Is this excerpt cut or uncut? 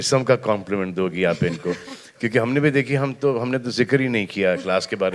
uncut